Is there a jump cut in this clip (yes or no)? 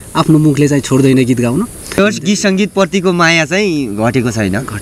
yes